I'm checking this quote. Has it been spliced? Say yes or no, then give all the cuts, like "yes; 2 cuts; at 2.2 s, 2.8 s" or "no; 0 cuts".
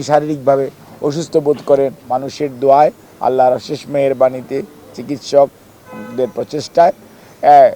yes; 1 cut; at 2.0 s